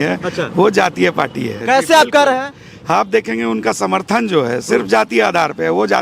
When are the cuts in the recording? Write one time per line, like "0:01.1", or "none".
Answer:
0:01.5